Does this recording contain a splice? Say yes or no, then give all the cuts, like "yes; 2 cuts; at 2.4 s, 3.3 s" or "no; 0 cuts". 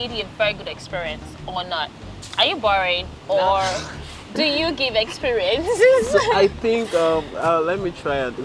no; 0 cuts